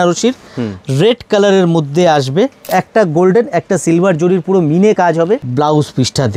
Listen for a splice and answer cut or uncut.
cut